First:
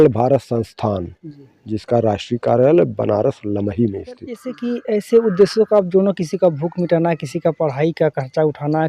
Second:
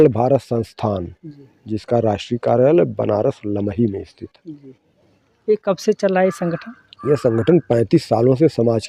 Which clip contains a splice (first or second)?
first